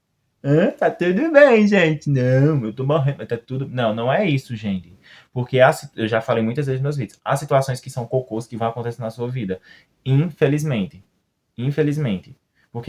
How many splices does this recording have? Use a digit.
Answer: 0